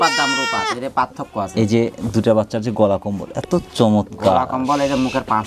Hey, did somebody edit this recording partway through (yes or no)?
no